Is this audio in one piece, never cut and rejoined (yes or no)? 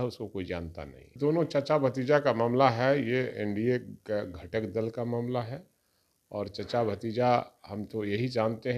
no